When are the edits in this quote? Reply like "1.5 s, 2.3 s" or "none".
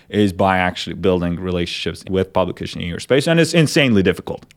2.0 s